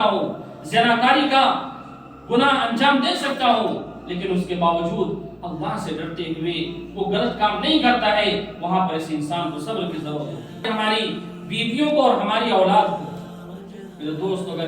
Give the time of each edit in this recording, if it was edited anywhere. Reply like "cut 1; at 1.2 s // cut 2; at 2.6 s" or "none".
cut 1; at 10.6 s

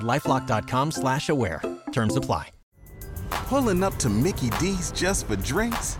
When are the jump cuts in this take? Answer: cut 1; at 2.6 s

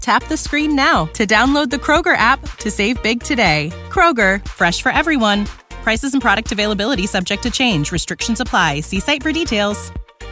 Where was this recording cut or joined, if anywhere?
none

